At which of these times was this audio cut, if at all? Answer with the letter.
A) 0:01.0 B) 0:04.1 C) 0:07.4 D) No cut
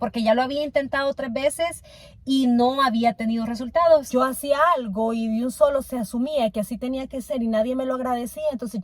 B